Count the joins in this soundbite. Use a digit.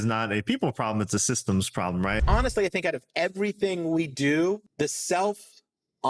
2